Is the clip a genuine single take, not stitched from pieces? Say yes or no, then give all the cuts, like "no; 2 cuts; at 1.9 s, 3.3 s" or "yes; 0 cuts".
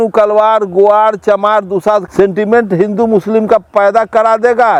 yes; 0 cuts